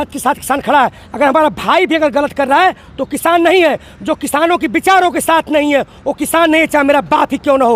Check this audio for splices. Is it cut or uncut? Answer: uncut